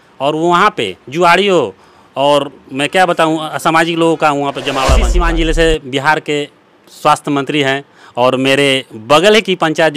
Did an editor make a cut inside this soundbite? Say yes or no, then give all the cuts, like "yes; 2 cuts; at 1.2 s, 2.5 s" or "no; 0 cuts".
yes; 1 cut; at 5.1 s